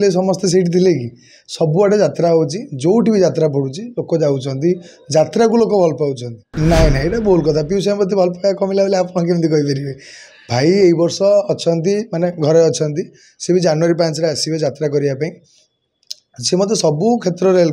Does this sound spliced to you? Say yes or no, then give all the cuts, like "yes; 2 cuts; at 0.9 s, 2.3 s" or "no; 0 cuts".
yes; 1 cut; at 6.5 s